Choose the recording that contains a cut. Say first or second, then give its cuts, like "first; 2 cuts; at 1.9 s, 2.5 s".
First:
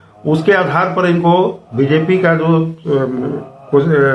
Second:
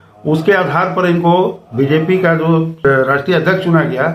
second; 1 cut; at 2.8 s